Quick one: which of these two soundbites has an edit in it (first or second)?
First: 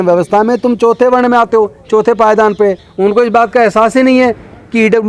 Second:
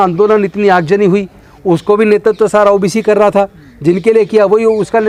first